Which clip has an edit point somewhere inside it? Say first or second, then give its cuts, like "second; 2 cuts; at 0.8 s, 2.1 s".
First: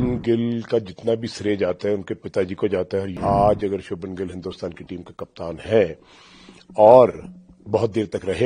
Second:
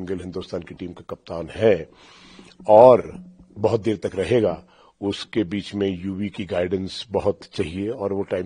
first; 1 cut; at 3.2 s